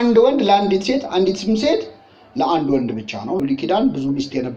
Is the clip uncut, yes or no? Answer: no